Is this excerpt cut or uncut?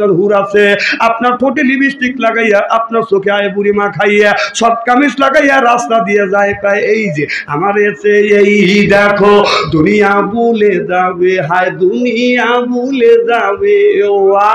uncut